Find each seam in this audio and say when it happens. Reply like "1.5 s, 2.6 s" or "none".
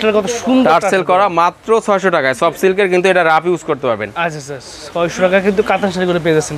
none